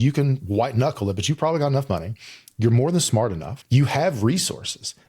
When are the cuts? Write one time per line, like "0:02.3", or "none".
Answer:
0:03.5